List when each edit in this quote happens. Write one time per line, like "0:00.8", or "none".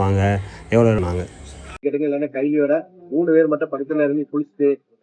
0:01.0